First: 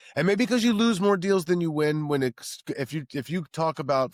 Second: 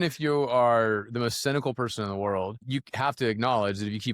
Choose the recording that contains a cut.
second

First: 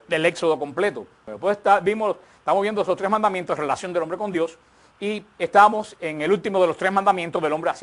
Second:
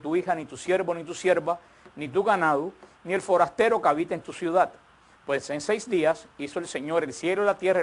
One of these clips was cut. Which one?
second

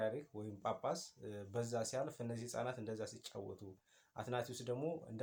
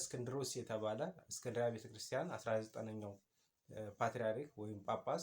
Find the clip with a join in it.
second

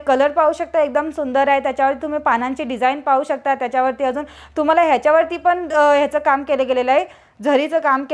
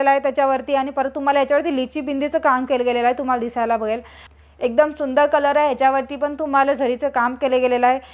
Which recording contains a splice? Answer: second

